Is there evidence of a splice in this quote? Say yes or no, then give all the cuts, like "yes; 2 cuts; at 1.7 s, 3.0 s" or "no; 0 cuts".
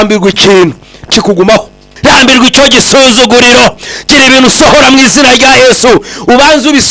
yes; 1 cut; at 1.8 s